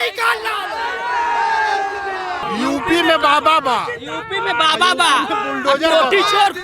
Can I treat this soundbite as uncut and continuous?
no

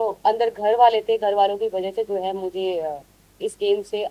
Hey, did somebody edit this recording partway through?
no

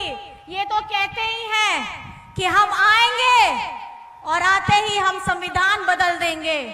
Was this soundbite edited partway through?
no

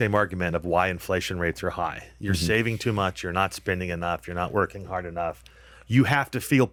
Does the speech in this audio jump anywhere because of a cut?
no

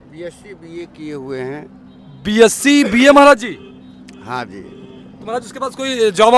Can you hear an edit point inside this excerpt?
no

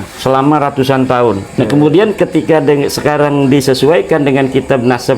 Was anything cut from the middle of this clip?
yes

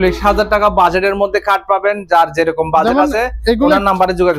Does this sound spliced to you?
no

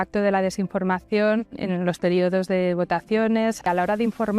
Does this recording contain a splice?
yes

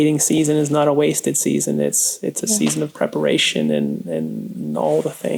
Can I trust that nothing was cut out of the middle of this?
yes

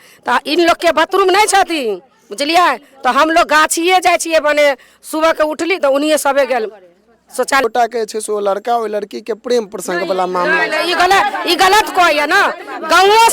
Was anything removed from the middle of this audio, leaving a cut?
yes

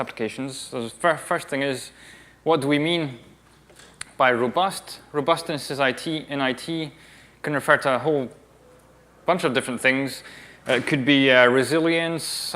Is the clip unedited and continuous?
no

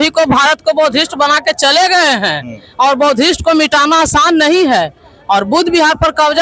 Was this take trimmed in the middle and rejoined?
no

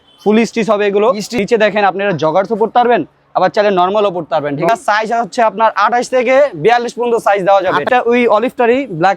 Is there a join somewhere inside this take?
yes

